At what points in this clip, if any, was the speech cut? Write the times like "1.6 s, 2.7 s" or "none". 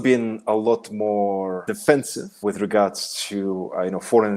1.7 s, 2.4 s